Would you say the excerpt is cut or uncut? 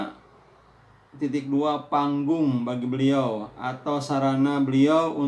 uncut